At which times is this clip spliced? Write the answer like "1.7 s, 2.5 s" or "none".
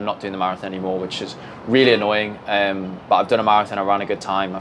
none